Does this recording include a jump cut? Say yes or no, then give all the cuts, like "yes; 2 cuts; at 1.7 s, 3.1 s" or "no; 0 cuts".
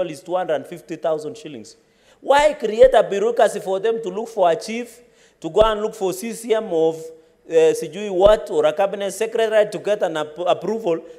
no; 0 cuts